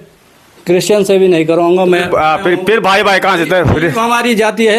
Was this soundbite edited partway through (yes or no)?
no